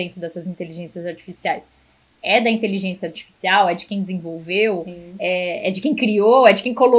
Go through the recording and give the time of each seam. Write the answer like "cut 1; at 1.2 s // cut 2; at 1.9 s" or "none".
none